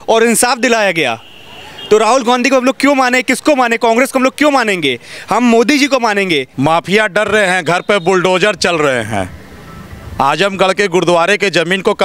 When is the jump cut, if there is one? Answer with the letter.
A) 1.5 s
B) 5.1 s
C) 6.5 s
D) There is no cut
C